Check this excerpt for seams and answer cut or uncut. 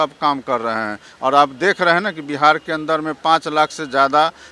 uncut